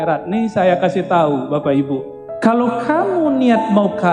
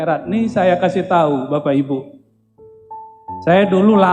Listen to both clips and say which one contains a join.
first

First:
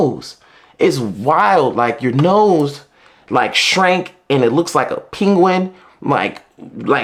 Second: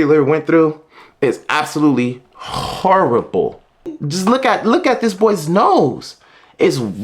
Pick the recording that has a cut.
second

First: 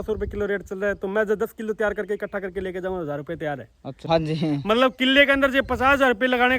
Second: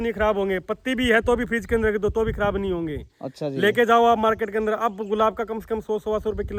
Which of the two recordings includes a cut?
first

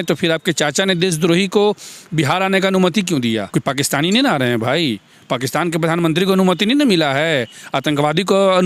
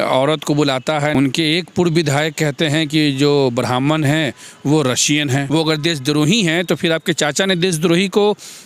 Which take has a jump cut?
second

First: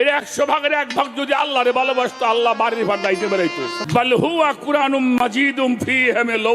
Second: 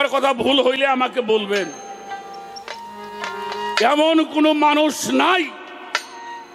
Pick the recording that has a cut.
first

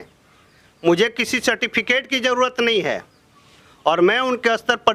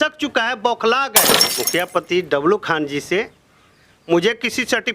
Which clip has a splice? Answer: second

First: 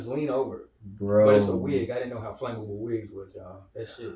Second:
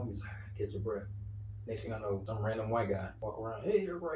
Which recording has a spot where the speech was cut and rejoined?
second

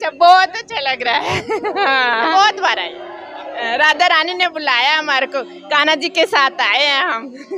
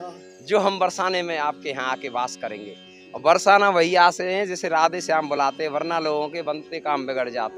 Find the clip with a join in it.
first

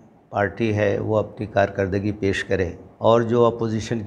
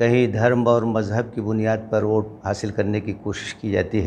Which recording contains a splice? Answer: first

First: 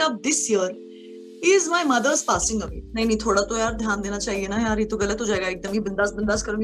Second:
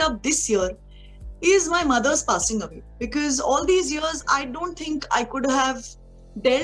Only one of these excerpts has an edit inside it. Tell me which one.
first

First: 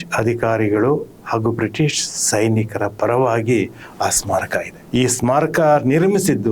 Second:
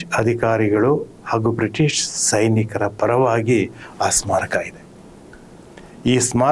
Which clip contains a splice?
first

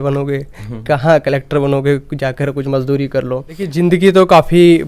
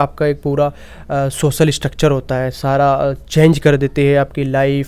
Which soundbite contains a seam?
first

